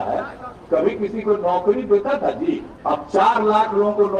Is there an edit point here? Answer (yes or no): yes